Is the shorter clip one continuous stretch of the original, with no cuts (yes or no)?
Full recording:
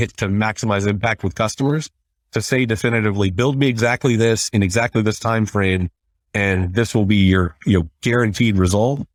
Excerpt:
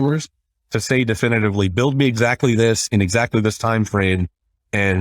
yes